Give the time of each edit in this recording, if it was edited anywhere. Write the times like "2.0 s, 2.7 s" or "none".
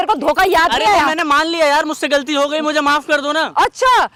none